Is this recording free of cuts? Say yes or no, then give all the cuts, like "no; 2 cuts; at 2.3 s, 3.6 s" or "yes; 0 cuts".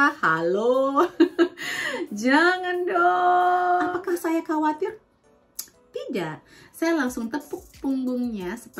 no; 1 cut; at 3.9 s